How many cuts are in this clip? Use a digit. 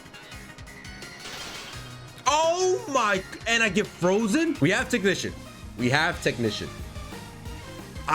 1